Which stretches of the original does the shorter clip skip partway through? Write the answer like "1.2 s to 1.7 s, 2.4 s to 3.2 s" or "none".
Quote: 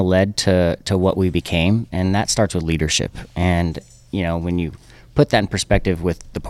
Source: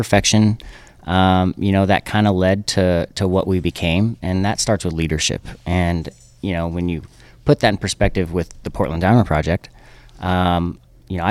none